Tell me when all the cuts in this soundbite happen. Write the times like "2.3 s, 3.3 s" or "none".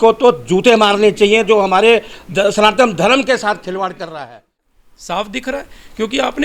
4.6 s